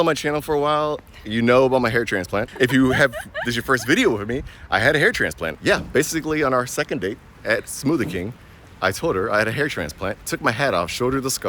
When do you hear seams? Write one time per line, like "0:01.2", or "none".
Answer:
0:02.5
0:05.5